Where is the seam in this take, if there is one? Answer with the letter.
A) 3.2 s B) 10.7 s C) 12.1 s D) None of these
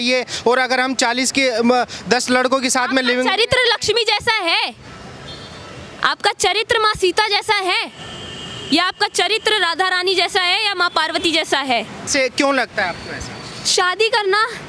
C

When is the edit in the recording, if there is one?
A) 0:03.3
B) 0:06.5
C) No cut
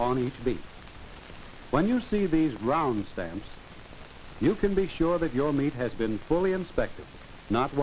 A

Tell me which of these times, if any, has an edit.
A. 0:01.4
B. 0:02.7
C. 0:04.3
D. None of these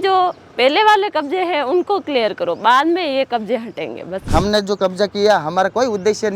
C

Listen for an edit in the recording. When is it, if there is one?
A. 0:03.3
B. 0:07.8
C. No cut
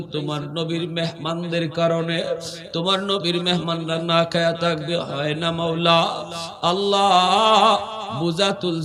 C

